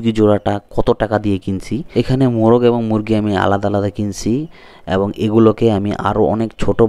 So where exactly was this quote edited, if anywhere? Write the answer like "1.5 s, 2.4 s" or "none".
none